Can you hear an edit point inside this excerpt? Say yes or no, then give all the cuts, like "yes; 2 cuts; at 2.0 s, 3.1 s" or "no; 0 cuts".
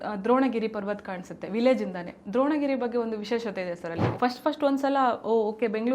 yes; 1 cut; at 4.1 s